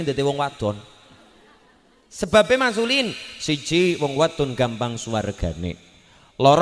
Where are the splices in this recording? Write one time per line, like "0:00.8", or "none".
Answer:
none